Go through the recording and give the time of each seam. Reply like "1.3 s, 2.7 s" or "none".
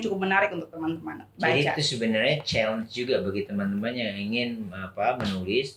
none